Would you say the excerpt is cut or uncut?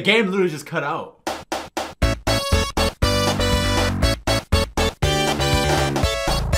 cut